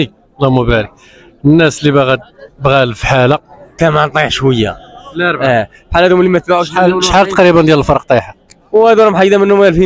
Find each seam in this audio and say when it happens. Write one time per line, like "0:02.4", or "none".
0:03.8